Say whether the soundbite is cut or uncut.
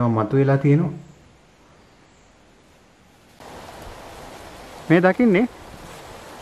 cut